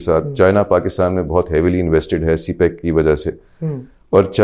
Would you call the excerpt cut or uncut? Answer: uncut